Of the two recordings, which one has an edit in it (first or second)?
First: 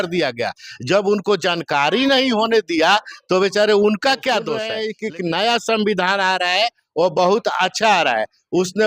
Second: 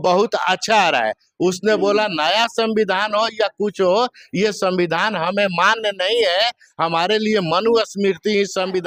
first